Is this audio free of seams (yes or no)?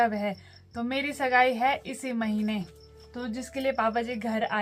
yes